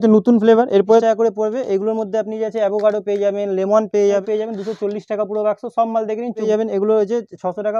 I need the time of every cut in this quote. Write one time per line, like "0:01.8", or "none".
0:01.0
0:04.2
0:06.5